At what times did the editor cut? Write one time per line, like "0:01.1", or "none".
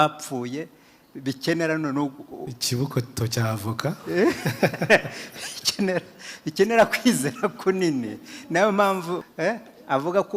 0:09.3